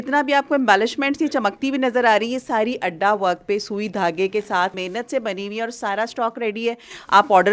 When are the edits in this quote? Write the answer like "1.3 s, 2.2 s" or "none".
4.8 s